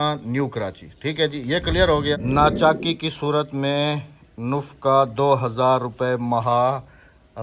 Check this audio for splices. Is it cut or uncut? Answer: cut